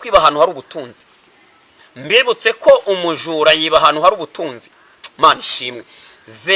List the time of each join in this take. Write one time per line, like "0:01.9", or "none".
none